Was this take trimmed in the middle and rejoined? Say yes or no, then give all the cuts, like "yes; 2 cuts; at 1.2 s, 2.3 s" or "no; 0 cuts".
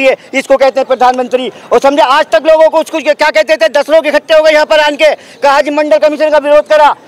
no; 0 cuts